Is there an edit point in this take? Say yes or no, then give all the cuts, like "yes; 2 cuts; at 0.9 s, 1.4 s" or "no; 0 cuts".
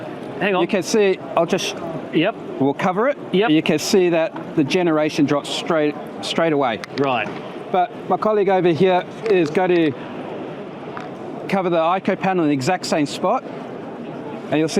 no; 0 cuts